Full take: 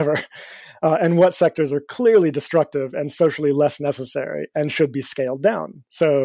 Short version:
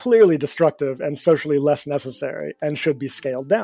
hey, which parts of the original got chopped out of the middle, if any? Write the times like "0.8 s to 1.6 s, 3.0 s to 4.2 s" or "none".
none

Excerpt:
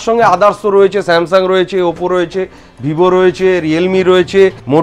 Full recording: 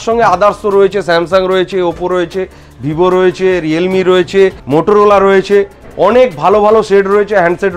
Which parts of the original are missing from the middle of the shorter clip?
none

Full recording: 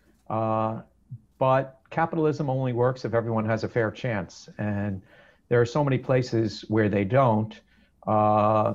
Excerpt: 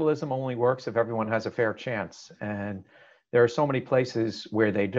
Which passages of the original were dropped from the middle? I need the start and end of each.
none

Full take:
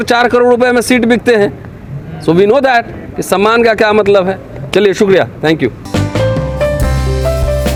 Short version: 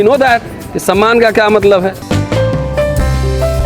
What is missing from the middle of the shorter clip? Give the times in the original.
4.5 s to 5.9 s

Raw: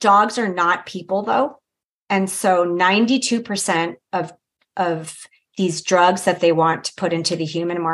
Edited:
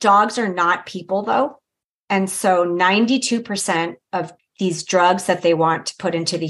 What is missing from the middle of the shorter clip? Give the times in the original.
4.4 s to 5.4 s

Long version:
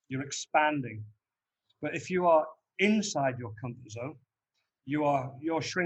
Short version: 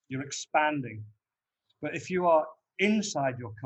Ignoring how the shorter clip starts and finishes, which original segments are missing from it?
none

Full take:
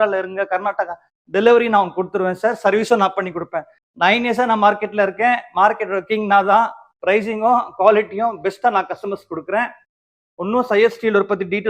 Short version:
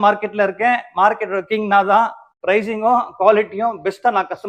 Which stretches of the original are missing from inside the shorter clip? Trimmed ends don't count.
none

